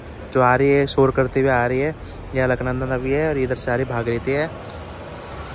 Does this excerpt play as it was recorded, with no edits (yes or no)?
yes